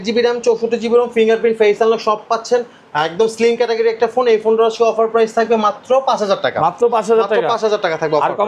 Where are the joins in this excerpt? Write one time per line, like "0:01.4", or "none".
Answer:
none